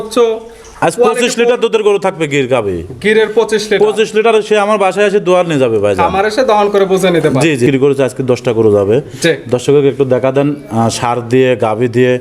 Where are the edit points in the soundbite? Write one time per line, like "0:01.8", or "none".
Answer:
0:07.7